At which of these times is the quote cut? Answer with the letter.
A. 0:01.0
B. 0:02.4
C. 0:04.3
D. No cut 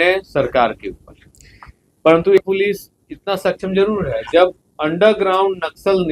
B